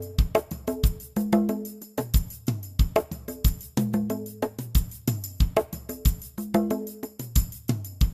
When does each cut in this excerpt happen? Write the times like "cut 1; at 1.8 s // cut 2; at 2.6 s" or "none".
cut 1; at 7.2 s